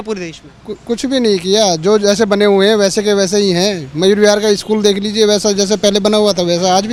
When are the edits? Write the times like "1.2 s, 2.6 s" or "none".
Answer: none